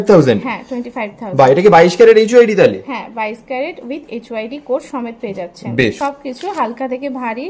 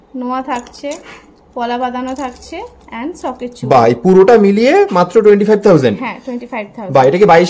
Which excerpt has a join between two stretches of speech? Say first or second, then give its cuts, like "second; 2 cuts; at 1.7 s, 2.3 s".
first; 1 cut; at 6.0 s